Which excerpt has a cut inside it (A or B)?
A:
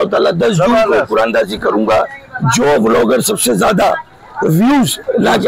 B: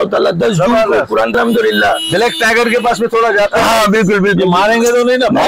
B